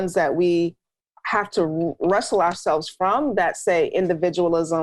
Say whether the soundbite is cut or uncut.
uncut